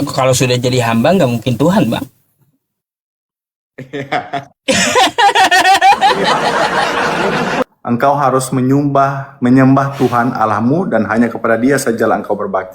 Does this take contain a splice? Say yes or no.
yes